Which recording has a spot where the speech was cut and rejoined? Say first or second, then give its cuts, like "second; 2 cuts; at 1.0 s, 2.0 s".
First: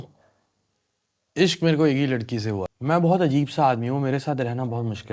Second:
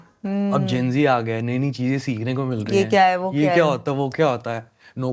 first; 1 cut; at 2.7 s